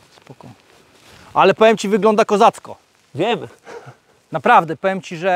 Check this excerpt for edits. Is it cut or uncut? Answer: uncut